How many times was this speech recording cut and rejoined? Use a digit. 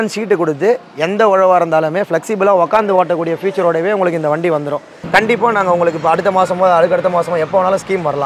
1